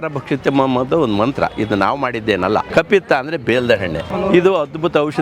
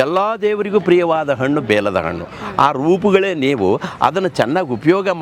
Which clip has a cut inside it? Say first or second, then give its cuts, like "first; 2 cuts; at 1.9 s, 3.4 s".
first; 2 cuts; at 2.7 s, 4.3 s